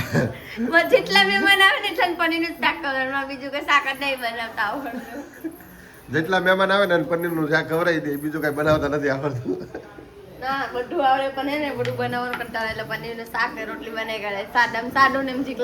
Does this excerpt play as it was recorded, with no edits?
yes; 0 cuts

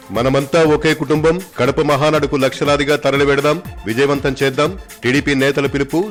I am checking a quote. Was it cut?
no; 0 cuts

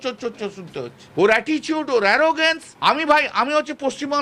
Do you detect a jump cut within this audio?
yes; 2 cuts; at 1.0 s, 2.7 s

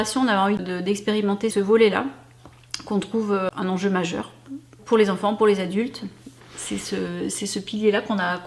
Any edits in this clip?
yes; 3 cuts; at 1.1 s, 3.5 s, 4.8 s

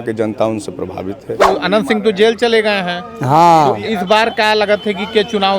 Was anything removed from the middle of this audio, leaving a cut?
yes; 1 cut; at 1.4 s

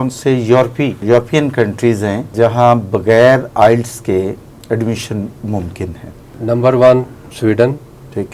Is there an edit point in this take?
yes; 4 cuts; at 1.0 s, 2.3 s, 6.4 s, 7.2 s

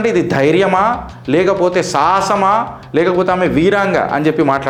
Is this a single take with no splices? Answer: yes; 0 cuts

